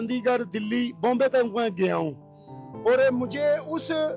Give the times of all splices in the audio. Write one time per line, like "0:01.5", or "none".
none